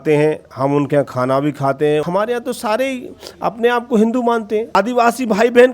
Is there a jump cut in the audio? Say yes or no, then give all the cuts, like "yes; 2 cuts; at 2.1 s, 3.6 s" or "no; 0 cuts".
yes; 2 cuts; at 2.0 s, 4.8 s